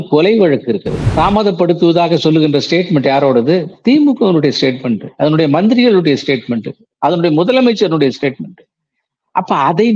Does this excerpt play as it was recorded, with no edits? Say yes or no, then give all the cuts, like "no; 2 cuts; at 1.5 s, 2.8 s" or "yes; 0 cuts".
no; 1 cut; at 1.1 s